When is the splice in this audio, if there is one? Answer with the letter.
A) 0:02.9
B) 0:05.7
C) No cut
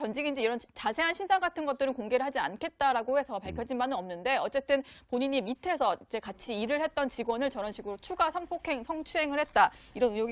A